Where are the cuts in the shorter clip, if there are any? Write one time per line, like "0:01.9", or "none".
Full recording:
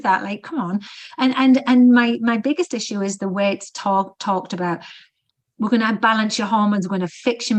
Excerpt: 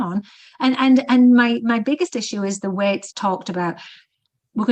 0:03.1